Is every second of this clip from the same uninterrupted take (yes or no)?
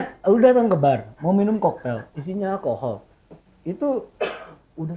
yes